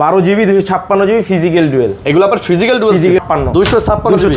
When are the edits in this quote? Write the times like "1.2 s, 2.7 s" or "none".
3.2 s